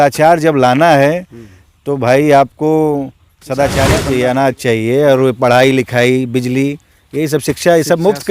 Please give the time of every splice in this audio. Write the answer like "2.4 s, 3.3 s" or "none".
4.0 s